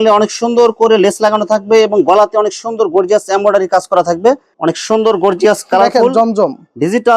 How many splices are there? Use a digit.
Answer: 1